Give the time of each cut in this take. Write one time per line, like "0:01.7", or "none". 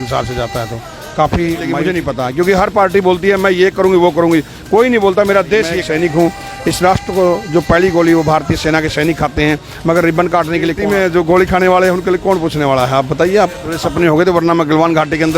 0:01.8
0:05.8
0:10.8
0:13.8